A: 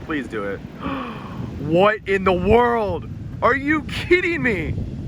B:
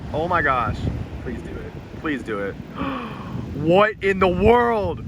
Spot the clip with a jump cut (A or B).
B